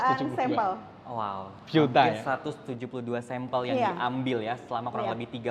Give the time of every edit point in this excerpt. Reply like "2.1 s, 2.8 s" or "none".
none